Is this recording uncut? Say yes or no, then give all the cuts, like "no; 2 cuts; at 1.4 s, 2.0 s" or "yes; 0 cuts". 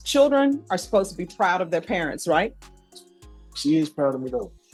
yes; 0 cuts